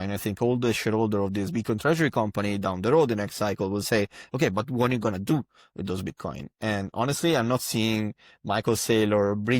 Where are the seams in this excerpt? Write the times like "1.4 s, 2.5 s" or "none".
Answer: none